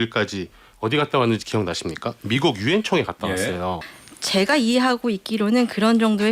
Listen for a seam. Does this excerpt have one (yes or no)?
yes